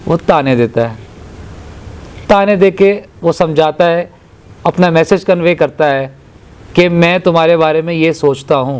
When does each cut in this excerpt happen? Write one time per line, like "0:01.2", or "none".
none